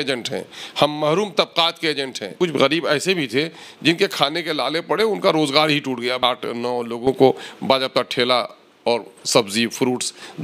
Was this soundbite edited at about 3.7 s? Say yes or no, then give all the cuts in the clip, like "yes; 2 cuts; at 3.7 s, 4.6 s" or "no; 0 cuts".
no; 2 cuts; at 2.3 s, 6.2 s